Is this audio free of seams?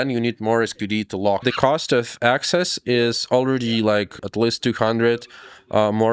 no; 2 cuts; at 1.4 s, 4.2 s

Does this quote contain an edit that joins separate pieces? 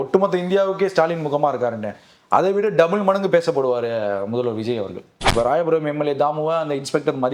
yes; 1 cut; at 5.2 s

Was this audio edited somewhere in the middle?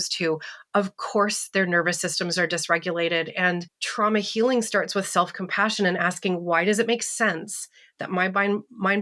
yes; 1 cut; at 3.8 s

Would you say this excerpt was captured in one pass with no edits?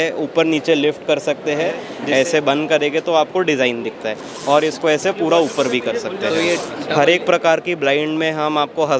no; 2 cuts; at 1.9 s, 6.8 s

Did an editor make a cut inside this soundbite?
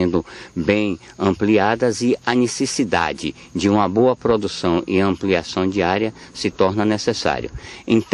yes; 1 cut; at 2.2 s

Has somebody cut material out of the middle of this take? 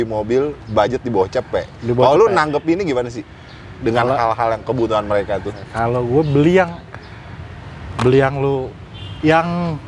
no; 0 cuts

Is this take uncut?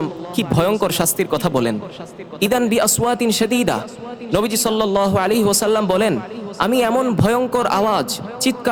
yes; 0 cuts

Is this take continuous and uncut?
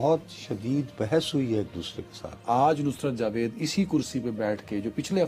no; 1 cut; at 2.4 s

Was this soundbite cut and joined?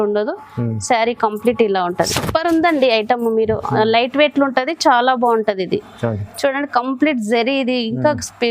yes; 1 cut; at 2.1 s

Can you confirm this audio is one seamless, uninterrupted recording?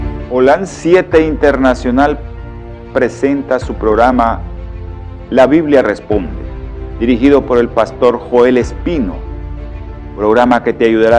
no; 1 cut; at 3.2 s

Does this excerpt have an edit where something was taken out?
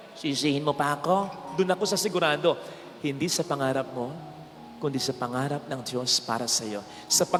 no; 0 cuts

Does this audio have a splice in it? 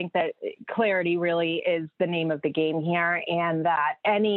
no; 0 cuts

